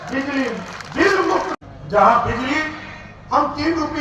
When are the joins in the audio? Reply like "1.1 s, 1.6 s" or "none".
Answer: 1.5 s